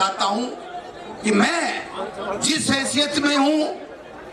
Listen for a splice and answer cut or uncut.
uncut